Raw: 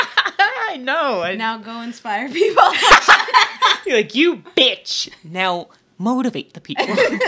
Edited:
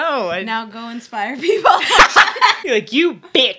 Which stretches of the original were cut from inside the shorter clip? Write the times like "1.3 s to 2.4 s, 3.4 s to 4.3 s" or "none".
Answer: 3.5 s to 3.8 s